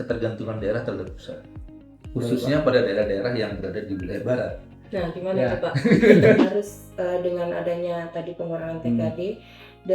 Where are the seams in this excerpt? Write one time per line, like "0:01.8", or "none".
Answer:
0:06.4